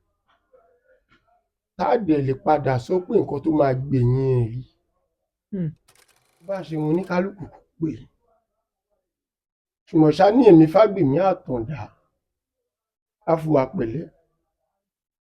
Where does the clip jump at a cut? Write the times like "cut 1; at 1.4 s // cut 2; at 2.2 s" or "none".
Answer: cut 1; at 6.5 s